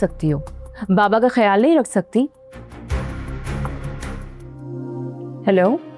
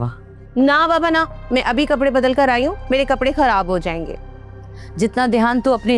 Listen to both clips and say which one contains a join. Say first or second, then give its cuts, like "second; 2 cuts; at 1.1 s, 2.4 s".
first; 1 cut; at 4.7 s